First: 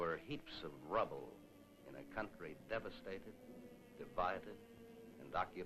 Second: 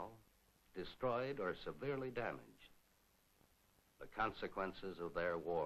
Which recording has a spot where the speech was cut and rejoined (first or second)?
first